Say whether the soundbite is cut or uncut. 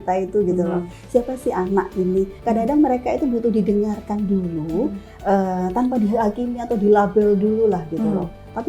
uncut